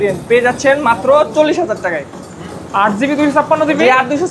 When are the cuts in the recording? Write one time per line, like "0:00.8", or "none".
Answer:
none